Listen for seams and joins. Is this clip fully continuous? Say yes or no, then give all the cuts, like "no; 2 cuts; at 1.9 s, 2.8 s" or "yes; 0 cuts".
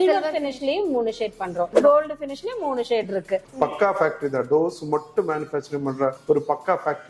no; 1 cut; at 3.5 s